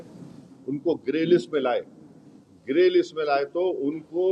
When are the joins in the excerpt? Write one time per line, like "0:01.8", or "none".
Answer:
none